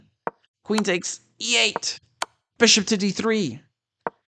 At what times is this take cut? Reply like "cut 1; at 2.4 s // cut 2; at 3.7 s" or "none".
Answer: cut 1; at 2.4 s

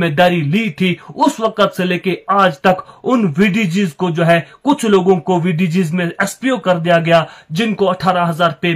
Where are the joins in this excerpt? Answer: none

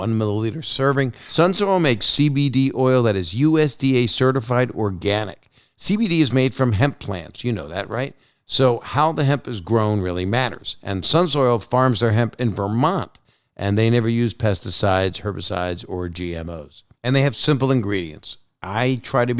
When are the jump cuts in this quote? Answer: cut 1; at 1.2 s

